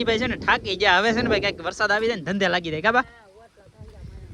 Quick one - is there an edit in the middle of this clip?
no; 0 cuts

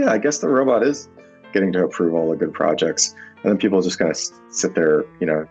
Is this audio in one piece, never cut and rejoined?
yes; 0 cuts

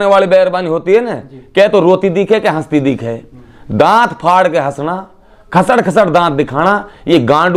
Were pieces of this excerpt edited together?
no; 0 cuts

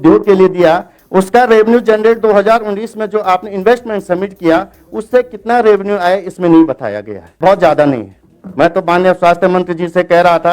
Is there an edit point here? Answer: yes; 1 cut; at 7.4 s

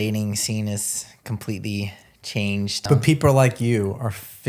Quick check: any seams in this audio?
yes; 1 cut; at 2.9 s

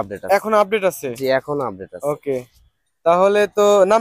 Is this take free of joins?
yes; 0 cuts

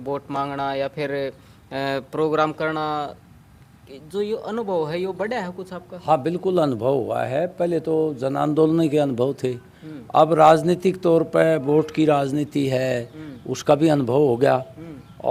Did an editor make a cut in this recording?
no; 0 cuts

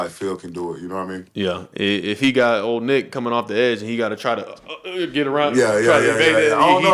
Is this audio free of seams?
yes; 0 cuts

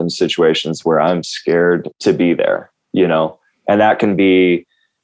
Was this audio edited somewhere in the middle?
no; 0 cuts

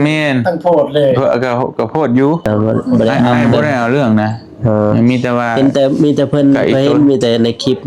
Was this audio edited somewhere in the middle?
yes; 1 cut; at 3.6 s

